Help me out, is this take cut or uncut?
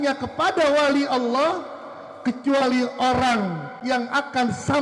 cut